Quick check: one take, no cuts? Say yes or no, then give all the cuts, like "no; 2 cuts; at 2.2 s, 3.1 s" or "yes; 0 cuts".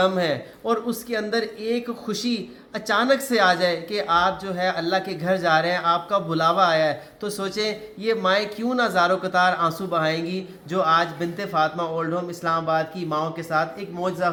yes; 0 cuts